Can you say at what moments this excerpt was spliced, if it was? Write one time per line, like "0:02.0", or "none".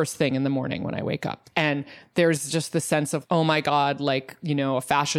0:01.3
0:03.2